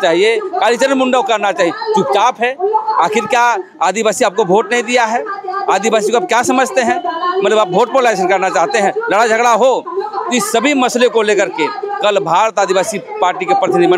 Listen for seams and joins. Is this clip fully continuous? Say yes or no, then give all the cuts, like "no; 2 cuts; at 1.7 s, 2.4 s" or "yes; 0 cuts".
yes; 0 cuts